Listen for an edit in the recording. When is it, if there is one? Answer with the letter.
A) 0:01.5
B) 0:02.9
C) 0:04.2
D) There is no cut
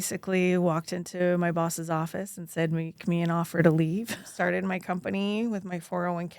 C